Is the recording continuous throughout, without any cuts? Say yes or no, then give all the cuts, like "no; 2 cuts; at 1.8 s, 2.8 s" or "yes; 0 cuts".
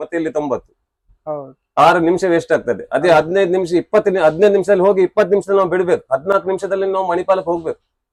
yes; 0 cuts